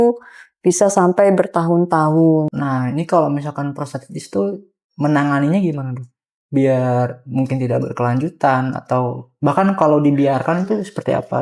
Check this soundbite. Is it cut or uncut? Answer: cut